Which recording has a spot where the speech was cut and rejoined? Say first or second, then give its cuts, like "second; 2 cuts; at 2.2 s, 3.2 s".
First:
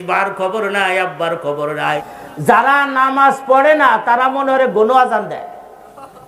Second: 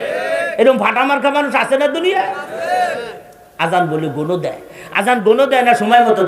first; 1 cut; at 2.0 s